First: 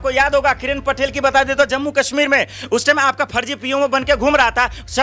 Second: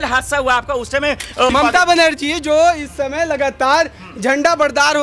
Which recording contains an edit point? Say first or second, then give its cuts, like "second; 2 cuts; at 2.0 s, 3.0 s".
second; 1 cut; at 1.5 s